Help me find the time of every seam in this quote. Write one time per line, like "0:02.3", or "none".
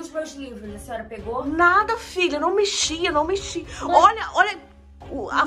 none